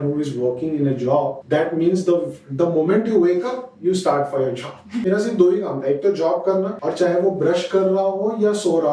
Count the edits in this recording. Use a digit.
3